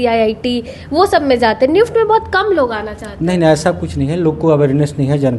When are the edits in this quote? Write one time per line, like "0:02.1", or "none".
none